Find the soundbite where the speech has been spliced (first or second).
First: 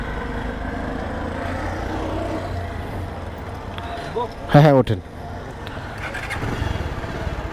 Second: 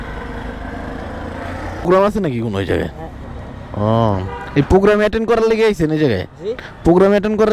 second